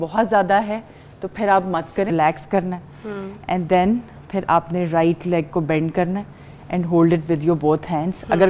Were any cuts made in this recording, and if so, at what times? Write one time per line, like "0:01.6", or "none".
0:02.1